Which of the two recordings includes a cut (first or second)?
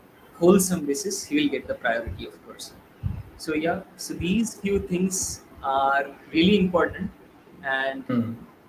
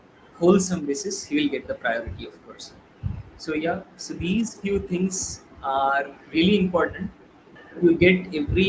second